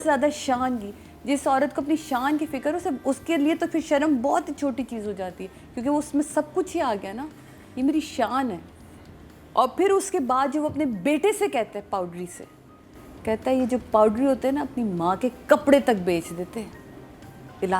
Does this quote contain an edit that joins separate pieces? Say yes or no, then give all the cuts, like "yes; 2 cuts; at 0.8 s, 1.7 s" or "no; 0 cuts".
yes; 1 cut; at 9.4 s